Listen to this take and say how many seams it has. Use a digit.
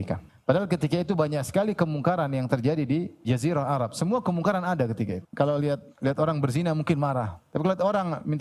1